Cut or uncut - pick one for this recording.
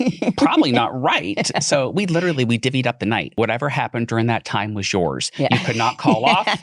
cut